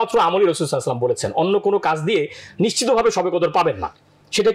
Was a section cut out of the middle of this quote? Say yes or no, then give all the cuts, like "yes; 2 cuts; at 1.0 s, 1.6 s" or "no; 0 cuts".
no; 0 cuts